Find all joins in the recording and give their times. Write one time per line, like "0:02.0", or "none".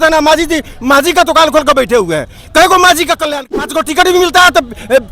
0:03.3